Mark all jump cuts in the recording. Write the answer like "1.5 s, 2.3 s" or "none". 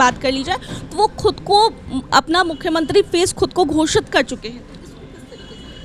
none